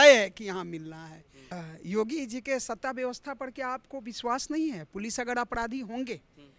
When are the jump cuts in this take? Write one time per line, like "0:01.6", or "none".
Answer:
0:01.5